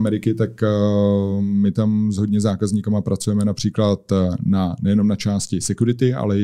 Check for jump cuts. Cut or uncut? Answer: uncut